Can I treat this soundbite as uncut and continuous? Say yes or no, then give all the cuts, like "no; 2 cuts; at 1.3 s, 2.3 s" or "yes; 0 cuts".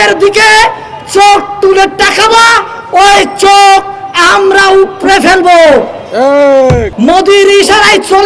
no; 1 cut; at 6.9 s